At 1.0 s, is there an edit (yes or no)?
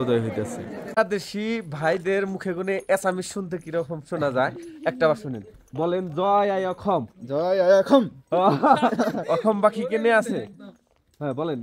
yes